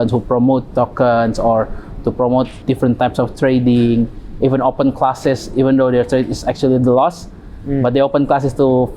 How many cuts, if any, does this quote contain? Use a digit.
1